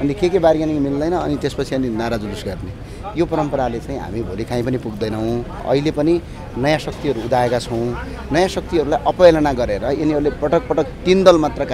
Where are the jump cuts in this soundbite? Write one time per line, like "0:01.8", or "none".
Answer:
0:05.5

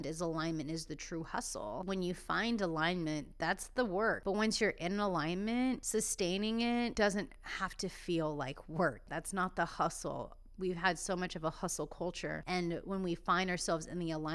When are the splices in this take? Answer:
0:01.8
0:04.2
0:05.8
0:06.9
0:09.1
0:12.4

